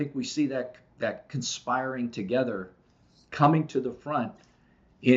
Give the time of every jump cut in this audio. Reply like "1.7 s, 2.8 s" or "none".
none